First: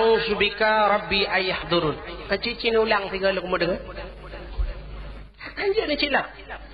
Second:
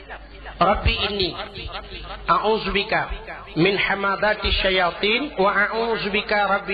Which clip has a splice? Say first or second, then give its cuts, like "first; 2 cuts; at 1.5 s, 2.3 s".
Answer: first; 1 cut; at 5.3 s